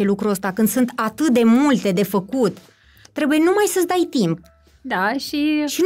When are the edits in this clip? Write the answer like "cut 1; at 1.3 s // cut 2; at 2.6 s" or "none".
none